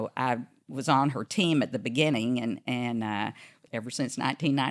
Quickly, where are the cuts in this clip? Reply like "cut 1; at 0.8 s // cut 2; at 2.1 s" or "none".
cut 1; at 3.6 s